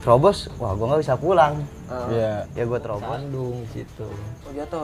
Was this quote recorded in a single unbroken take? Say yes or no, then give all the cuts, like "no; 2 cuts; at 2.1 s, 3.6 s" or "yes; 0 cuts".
no; 1 cut; at 3.0 s